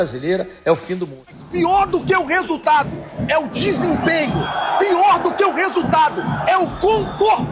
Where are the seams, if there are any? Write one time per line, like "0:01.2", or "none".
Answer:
0:01.4